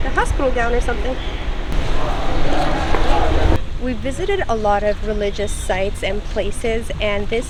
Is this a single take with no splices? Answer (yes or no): yes